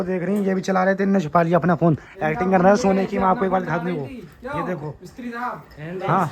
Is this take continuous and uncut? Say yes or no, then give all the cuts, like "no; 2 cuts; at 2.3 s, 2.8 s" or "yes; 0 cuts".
yes; 0 cuts